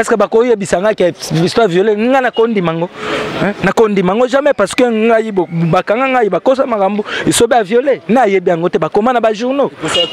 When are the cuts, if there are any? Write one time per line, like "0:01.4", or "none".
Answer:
none